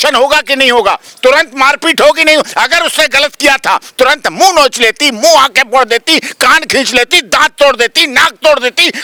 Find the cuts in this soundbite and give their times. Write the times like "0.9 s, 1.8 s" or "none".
none